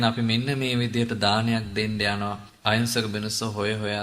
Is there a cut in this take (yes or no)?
yes